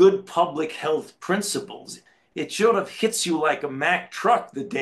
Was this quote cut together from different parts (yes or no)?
yes